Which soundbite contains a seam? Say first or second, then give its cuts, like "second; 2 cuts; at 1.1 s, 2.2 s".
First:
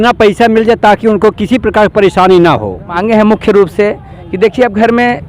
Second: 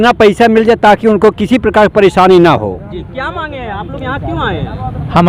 first; 1 cut; at 3.0 s